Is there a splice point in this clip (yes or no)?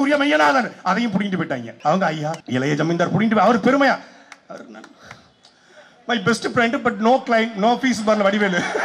yes